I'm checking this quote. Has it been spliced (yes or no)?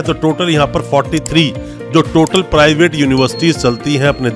no